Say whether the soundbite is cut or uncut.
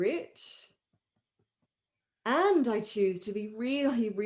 cut